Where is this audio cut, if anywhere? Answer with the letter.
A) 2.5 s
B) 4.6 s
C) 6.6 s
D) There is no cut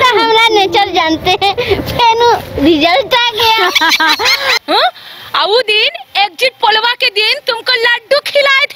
B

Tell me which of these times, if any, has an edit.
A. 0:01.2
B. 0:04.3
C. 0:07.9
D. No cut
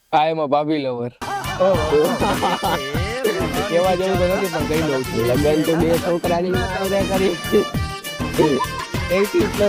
D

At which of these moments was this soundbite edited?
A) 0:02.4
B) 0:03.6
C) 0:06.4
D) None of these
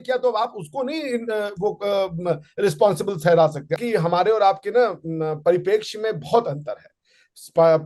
B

